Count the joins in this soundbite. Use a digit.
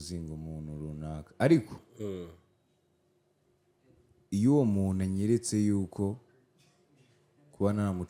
0